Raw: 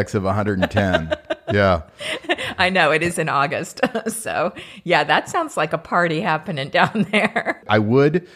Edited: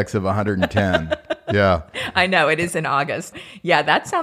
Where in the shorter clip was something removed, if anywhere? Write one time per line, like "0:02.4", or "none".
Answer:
0:02.0
0:03.3